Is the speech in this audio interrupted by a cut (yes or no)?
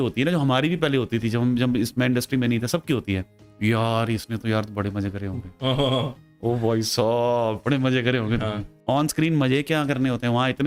no